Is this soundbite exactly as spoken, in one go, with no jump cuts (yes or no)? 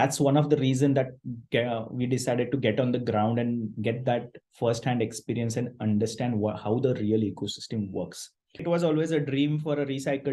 no